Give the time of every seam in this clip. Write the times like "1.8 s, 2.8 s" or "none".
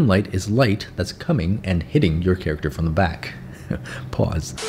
none